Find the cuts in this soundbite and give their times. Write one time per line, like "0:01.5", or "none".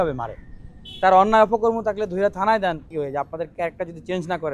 0:02.9